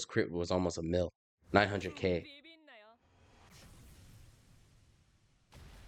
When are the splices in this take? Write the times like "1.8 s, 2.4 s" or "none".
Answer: none